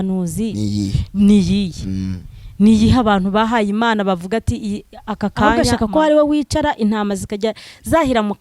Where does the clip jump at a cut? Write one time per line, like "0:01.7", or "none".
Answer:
0:05.6